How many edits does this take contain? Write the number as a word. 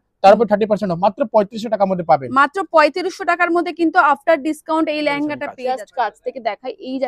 one